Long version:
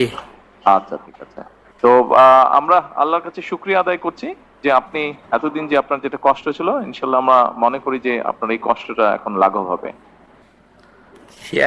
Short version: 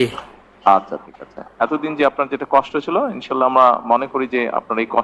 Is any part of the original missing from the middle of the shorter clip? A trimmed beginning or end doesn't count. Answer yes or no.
yes